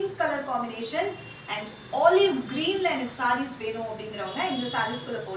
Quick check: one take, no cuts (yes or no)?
yes